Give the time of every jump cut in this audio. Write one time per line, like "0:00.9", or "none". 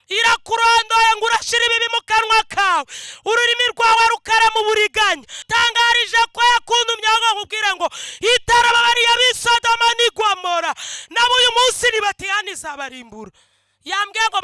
0:05.4